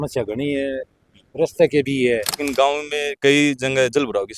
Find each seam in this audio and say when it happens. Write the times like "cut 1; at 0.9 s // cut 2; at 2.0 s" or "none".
cut 1; at 2.4 s